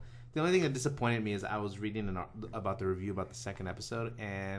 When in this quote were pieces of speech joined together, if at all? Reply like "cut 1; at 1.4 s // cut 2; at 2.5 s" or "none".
cut 1; at 1.4 s